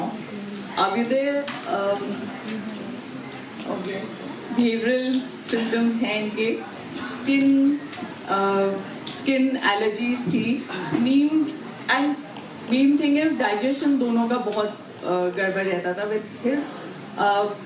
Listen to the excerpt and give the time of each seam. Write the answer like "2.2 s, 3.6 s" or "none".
none